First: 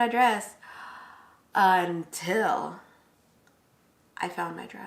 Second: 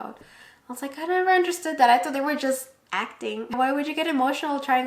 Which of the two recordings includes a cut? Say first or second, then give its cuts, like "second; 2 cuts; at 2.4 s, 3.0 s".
second; 1 cut; at 3.6 s